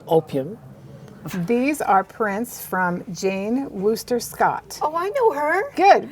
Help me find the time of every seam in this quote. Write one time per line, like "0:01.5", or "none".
0:01.2